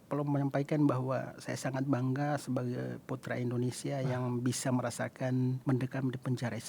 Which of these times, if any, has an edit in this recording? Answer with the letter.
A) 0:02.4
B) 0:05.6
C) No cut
B